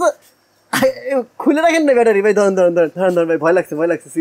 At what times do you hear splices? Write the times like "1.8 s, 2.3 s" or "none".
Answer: 2.9 s